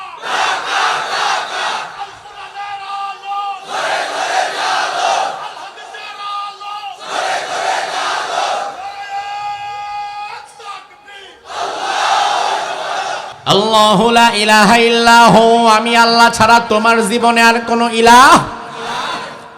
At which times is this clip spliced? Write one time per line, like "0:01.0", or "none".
0:13.3